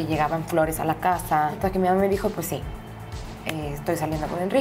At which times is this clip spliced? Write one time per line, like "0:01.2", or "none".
0:01.6